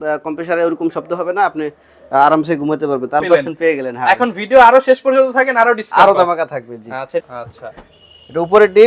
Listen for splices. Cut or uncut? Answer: cut